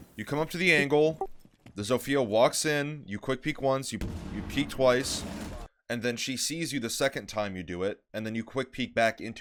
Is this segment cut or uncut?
uncut